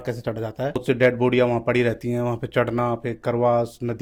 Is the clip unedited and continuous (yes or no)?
yes